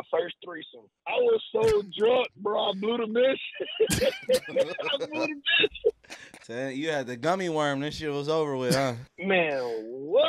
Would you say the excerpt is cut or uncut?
cut